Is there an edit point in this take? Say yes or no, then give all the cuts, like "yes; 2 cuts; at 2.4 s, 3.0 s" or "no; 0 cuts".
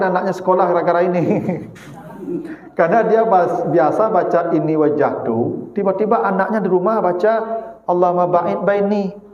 no; 0 cuts